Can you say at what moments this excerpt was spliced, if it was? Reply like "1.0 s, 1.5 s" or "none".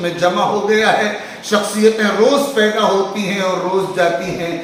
none